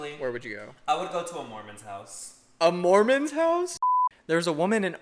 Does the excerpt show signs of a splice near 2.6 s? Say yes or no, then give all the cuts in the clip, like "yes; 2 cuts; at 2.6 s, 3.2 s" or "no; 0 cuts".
no; 1 cut; at 3.8 s